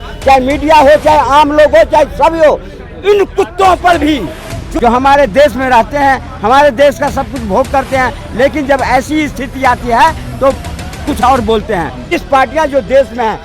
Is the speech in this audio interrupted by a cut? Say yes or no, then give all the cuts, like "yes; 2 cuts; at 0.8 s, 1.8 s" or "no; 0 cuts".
yes; 2 cuts; at 4.6 s, 12.1 s